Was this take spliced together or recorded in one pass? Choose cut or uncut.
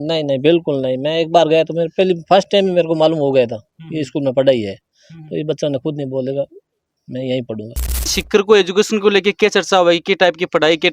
cut